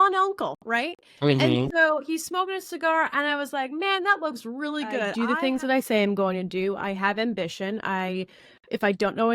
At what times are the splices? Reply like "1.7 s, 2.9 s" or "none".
5.1 s